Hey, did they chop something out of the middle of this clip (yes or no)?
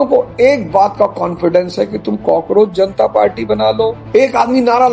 yes